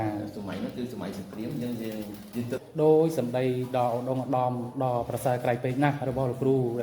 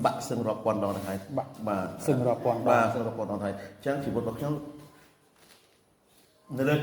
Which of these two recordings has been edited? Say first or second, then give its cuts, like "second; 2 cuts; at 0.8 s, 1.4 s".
first; 1 cut; at 2.6 s